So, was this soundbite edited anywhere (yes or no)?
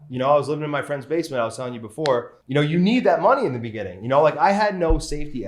yes